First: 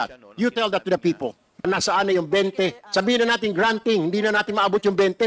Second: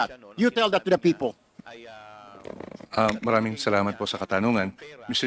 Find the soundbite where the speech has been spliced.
first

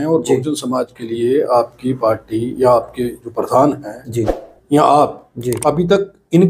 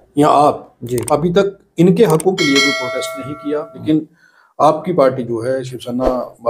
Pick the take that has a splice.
second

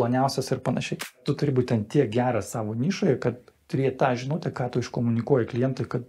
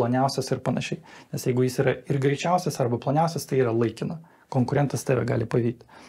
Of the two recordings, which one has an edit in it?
first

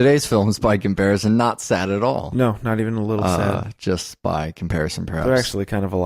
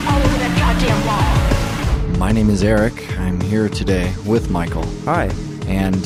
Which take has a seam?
first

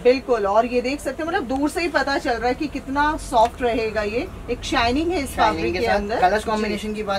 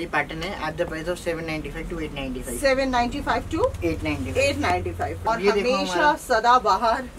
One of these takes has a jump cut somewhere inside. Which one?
second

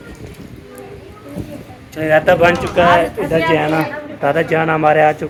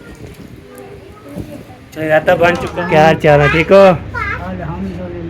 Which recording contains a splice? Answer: second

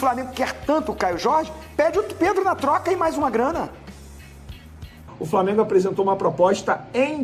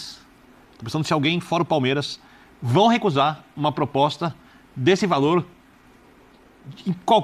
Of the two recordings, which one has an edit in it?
first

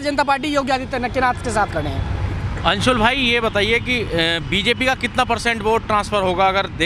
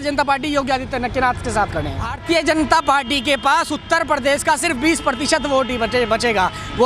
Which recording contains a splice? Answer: second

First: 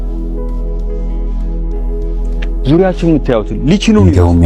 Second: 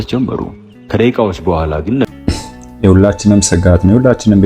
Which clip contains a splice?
second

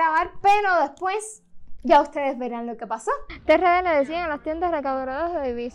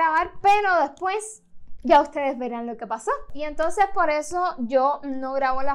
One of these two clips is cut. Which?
first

